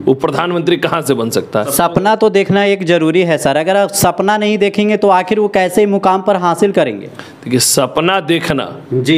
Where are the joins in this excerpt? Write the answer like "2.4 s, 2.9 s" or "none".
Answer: 1.7 s